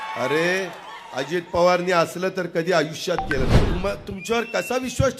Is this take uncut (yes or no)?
no